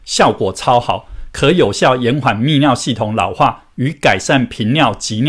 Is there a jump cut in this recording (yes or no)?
no